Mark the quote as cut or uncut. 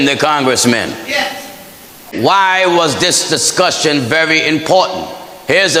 uncut